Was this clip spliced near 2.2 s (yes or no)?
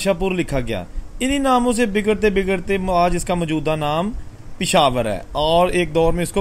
no